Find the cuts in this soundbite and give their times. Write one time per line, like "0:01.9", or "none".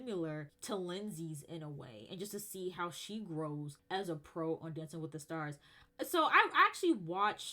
none